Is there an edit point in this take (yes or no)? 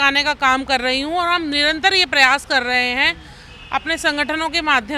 no